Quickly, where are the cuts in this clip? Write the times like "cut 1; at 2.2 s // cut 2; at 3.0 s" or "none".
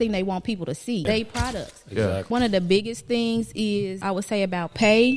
cut 1; at 1.0 s // cut 2; at 2.3 s // cut 3; at 4.0 s